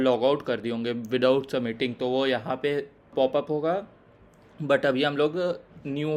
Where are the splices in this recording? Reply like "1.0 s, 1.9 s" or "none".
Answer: 3.1 s